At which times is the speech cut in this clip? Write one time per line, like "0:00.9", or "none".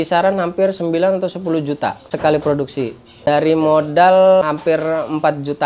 0:02.0
0:03.3
0:04.4

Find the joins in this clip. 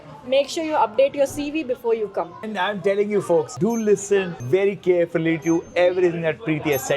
0:02.5
0:03.5
0:04.4

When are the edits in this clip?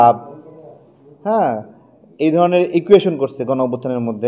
none

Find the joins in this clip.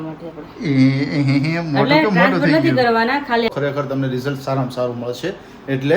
0:03.5

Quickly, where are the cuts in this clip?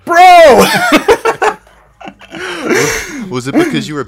none

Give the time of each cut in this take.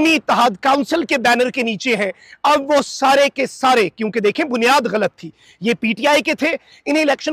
none

